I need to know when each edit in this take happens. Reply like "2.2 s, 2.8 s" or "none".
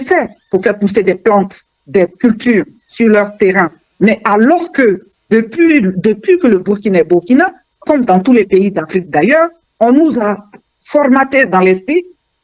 3.8 s, 7.7 s, 9.7 s